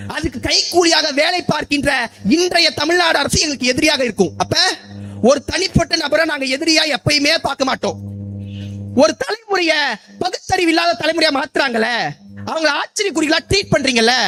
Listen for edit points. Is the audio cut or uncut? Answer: uncut